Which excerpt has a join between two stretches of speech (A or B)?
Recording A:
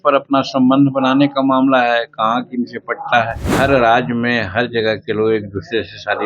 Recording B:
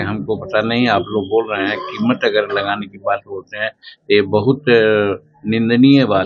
A